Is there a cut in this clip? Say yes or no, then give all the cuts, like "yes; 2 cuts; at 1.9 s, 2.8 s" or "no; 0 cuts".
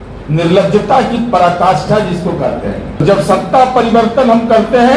yes; 1 cut; at 3.0 s